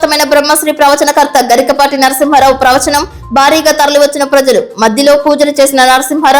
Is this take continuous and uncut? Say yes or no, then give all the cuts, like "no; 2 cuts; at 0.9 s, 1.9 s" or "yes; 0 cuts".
yes; 0 cuts